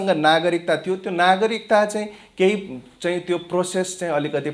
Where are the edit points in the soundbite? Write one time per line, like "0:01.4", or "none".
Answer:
none